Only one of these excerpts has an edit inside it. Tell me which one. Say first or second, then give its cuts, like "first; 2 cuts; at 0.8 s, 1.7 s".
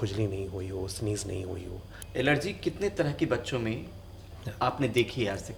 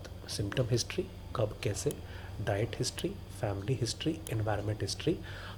first; 1 cut; at 2.0 s